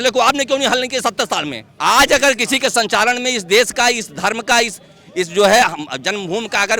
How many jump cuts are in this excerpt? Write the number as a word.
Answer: one